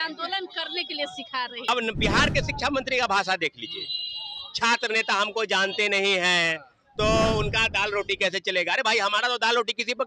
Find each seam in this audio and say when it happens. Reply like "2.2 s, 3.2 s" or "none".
1.7 s